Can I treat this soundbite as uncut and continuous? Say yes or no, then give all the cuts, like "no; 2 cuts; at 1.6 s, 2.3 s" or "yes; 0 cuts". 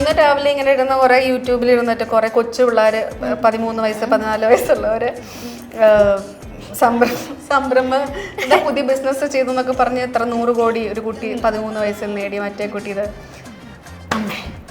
yes; 0 cuts